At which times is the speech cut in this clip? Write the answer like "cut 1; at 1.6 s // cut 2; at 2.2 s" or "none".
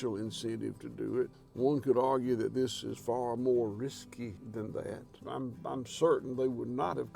cut 1; at 1.4 s // cut 2; at 4.4 s // cut 3; at 5.2 s